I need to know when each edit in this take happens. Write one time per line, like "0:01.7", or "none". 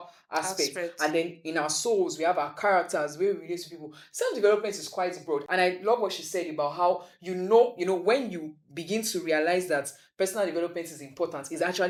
none